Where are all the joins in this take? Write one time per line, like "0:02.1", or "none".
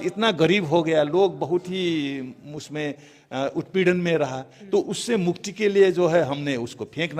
none